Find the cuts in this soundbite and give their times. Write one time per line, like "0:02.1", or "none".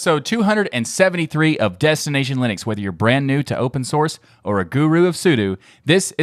none